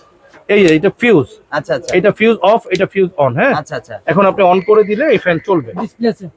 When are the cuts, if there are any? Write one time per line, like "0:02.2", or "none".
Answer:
none